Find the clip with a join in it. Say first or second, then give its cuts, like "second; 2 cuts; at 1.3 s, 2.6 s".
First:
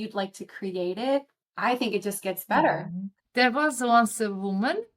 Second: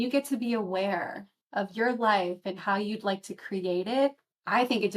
first; 1 cut; at 3.2 s